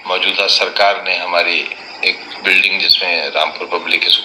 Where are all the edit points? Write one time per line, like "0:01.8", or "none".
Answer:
none